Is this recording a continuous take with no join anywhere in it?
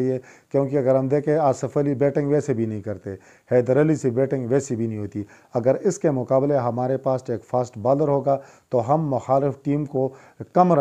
yes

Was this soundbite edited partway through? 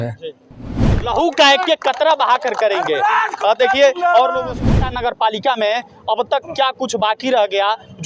yes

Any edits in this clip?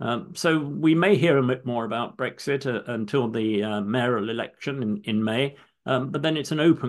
no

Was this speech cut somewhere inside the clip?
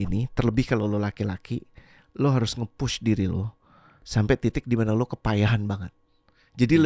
no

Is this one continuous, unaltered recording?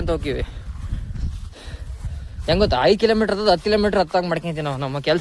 yes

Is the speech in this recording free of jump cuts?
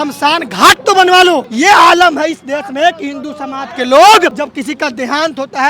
no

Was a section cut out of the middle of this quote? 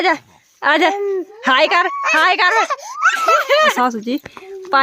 yes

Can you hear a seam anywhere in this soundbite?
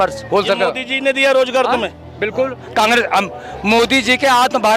no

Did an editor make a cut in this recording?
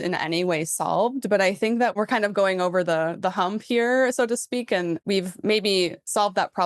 yes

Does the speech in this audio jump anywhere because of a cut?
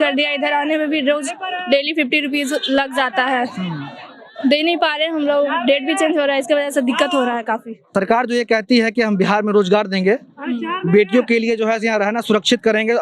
no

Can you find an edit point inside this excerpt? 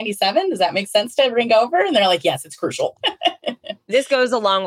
yes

